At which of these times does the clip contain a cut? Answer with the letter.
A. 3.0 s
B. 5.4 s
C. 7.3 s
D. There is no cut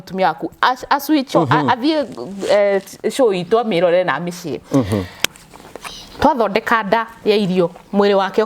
B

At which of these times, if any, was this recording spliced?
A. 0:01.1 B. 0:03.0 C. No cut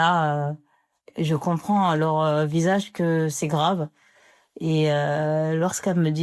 A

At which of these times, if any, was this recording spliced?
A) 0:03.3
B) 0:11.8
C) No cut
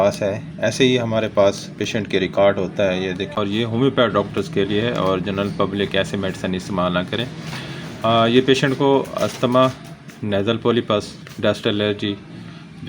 A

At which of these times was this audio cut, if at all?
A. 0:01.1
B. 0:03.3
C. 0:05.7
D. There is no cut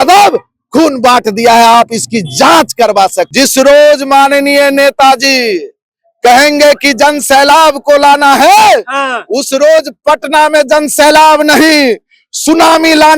B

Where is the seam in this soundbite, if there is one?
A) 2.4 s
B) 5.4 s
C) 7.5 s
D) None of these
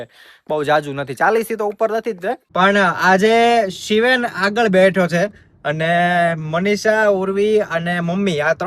A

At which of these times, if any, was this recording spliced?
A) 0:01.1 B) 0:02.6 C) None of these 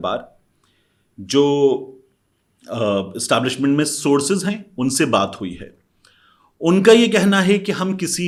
C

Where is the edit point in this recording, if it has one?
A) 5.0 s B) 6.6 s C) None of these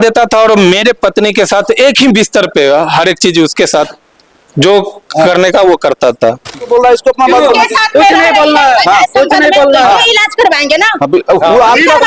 B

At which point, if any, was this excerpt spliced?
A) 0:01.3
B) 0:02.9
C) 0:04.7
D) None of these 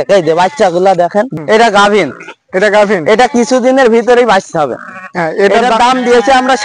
A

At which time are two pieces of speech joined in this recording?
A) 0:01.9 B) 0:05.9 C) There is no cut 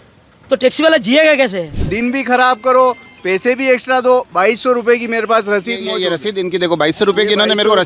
A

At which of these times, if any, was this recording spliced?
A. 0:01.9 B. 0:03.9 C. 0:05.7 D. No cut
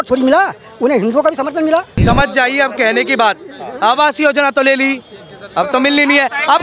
A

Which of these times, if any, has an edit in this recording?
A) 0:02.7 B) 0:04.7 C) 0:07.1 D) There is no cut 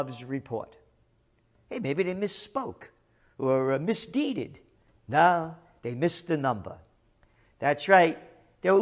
A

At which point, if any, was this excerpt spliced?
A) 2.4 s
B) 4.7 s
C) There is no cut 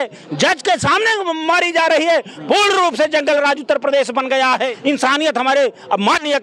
B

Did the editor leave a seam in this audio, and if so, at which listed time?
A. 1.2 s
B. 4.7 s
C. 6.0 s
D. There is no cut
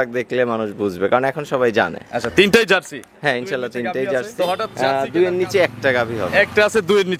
B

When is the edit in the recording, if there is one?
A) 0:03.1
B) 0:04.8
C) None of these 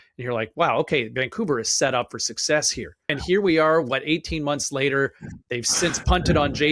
A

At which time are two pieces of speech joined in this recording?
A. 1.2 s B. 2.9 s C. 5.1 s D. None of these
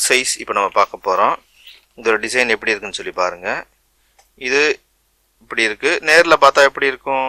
D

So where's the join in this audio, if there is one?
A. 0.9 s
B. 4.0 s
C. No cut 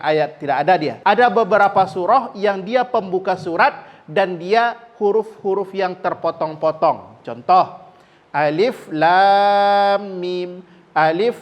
A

